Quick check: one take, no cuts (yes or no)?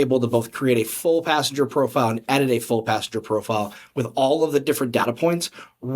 yes